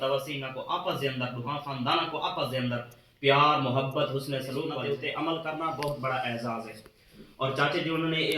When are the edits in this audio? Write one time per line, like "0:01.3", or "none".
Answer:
0:04.7